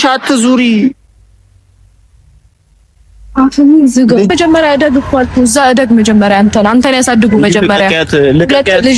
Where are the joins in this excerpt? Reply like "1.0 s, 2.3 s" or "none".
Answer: 4.3 s